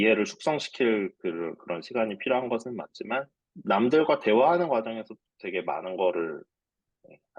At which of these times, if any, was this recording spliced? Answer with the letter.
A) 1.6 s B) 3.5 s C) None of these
B